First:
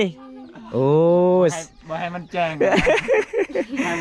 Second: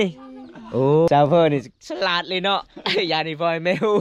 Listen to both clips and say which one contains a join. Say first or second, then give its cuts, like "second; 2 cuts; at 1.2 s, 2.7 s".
second; 1 cut; at 1.1 s